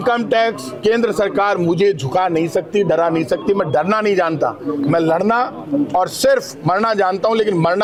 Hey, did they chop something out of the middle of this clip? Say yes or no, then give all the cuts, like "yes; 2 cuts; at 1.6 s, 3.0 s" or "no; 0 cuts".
no; 0 cuts